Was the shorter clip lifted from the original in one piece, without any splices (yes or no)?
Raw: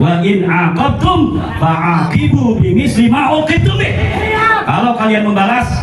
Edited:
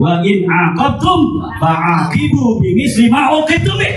yes